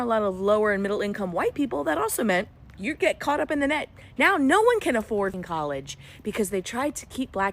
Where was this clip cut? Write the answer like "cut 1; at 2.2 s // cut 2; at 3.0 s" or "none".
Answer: cut 1; at 5.4 s